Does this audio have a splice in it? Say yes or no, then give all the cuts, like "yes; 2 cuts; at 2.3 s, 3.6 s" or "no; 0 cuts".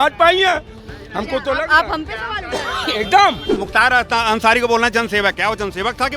yes; 1 cut; at 3.5 s